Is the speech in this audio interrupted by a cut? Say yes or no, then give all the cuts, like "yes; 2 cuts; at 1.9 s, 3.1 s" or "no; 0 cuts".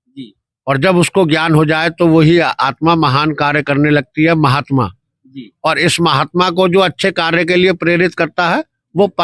no; 0 cuts